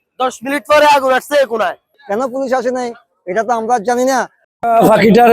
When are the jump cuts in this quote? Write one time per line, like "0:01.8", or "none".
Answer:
0:01.9
0:04.4